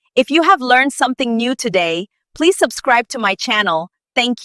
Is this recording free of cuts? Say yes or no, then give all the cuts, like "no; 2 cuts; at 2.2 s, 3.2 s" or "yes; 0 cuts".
yes; 0 cuts